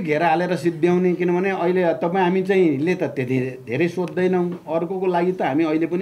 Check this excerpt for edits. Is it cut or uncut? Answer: uncut